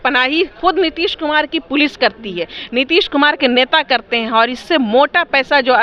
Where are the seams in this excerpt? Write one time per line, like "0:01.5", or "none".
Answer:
none